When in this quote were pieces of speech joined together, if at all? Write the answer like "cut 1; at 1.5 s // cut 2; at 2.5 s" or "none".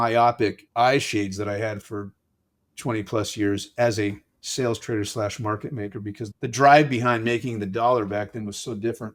none